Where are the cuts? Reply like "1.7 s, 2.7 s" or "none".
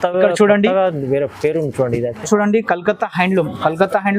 2.3 s